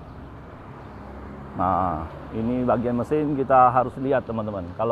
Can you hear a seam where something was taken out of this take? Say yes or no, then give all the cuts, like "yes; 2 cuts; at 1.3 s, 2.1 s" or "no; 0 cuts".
no; 0 cuts